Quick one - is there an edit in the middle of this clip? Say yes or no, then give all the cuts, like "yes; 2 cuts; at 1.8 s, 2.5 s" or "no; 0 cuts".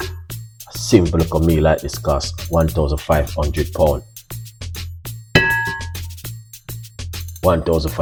no; 0 cuts